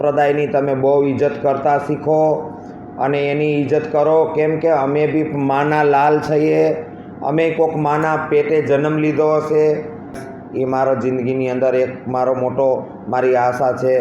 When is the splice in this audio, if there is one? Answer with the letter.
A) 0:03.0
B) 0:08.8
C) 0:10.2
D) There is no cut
C